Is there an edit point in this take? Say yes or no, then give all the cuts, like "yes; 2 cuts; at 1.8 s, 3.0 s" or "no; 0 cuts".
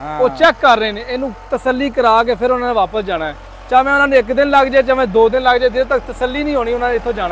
no; 0 cuts